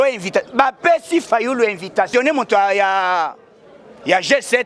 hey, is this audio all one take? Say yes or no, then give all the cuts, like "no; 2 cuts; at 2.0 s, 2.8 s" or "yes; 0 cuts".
no; 1 cut; at 2.1 s